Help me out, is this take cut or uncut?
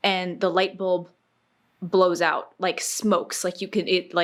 uncut